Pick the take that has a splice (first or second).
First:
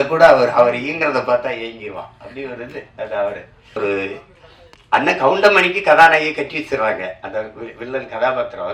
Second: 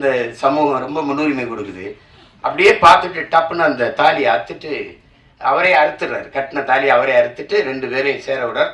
first